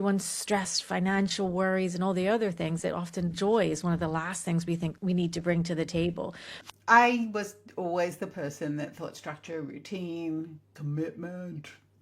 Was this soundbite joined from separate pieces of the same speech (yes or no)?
yes